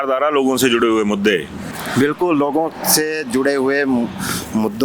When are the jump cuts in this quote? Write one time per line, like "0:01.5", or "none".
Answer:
none